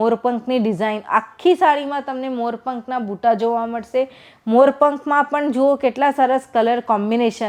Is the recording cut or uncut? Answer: uncut